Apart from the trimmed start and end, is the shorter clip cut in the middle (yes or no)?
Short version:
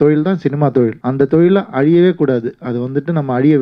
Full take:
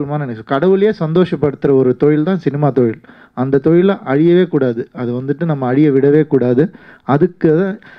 yes